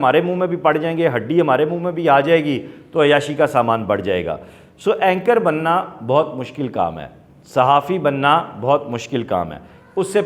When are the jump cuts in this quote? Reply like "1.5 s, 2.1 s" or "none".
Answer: none